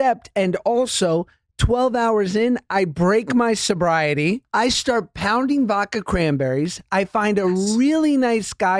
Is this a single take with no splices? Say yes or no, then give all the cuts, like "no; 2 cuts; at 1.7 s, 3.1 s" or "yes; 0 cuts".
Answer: no; 1 cut; at 4.4 s